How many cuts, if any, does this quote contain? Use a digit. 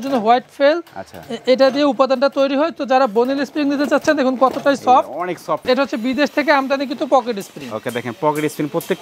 1